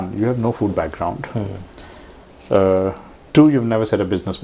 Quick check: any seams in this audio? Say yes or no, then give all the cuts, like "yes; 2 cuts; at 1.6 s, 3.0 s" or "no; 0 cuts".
no; 0 cuts